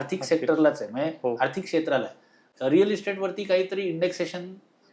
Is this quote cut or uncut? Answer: cut